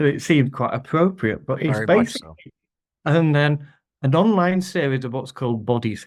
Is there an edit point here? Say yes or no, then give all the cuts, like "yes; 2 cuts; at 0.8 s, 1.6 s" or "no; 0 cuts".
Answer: no; 0 cuts